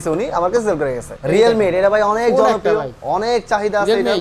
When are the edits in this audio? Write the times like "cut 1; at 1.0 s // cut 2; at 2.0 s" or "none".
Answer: cut 1; at 1.1 s